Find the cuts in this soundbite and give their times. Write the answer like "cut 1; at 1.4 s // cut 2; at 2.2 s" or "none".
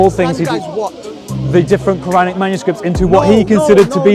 none